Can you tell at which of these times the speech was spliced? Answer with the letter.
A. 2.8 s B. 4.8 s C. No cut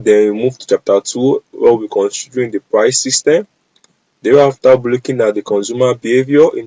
C